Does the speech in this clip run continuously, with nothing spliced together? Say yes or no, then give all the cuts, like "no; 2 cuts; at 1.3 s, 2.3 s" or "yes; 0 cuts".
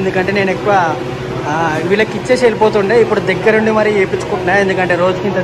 yes; 0 cuts